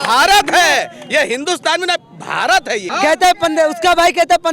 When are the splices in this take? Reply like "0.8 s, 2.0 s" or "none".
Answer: 2.8 s